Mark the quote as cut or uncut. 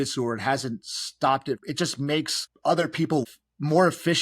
cut